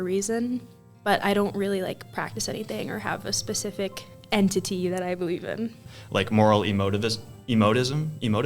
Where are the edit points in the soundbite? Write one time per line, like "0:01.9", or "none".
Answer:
0:05.9